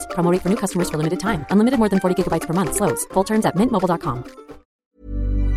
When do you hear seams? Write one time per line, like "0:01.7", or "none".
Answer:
0:04.6